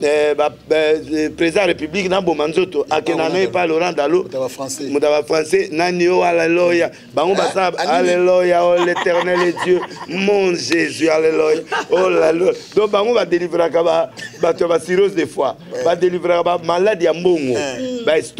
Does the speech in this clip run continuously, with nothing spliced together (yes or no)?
yes